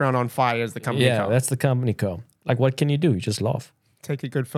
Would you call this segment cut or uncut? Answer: cut